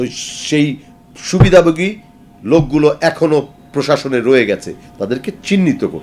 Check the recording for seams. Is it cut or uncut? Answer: uncut